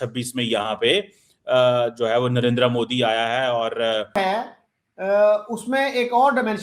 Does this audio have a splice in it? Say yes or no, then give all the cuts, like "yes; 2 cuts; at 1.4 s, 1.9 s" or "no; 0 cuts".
yes; 1 cut; at 4.2 s